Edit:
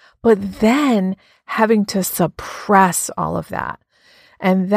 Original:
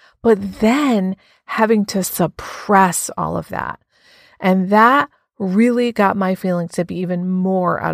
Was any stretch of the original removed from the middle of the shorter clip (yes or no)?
no